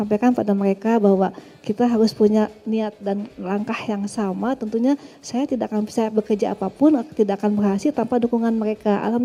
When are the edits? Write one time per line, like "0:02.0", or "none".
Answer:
none